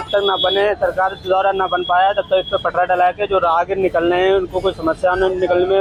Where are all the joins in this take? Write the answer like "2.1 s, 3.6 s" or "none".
none